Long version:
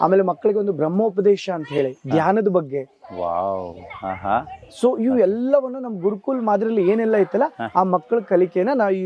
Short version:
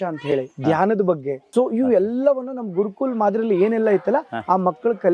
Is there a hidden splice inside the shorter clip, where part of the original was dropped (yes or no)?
yes